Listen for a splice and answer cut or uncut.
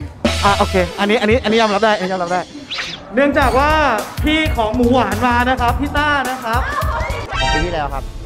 cut